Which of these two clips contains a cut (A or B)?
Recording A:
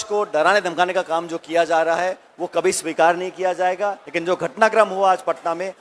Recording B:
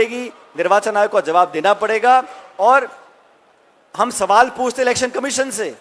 A